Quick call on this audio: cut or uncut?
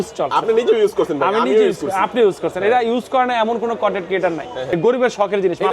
cut